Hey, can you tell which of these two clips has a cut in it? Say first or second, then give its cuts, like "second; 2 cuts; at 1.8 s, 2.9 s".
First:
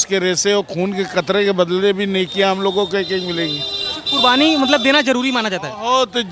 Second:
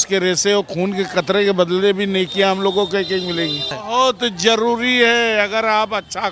second; 1 cut; at 3.7 s